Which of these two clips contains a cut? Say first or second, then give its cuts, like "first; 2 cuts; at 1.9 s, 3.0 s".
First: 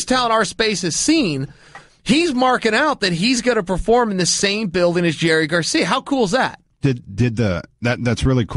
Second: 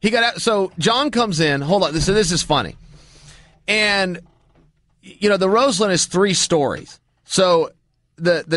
second; 1 cut; at 3.9 s